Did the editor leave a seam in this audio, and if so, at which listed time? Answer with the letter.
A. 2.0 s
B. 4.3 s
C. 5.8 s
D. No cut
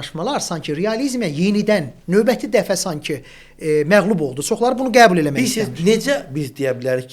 D